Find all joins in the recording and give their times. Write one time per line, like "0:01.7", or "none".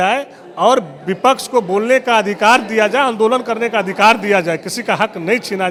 none